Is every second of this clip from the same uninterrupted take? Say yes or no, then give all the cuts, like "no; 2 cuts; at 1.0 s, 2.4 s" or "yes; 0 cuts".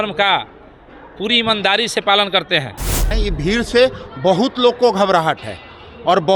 no; 1 cut; at 3.1 s